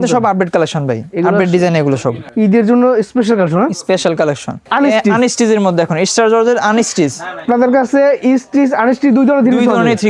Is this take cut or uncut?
cut